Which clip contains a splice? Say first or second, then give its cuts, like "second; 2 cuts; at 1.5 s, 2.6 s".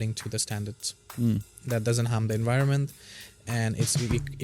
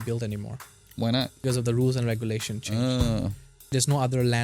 second; 2 cuts; at 1.4 s, 3.7 s